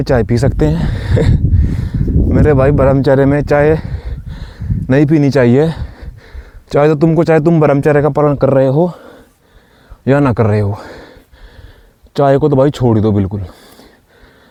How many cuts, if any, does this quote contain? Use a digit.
0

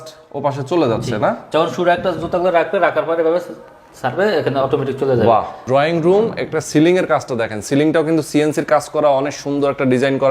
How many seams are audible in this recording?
1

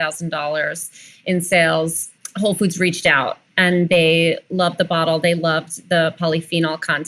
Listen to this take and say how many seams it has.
1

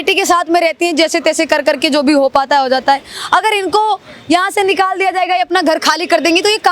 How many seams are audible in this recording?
0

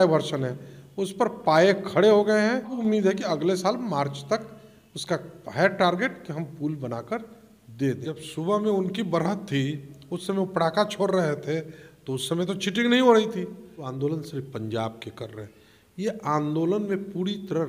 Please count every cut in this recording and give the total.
3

